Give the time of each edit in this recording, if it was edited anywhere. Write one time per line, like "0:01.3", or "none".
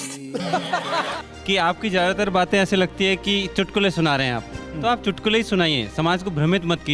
0:01.2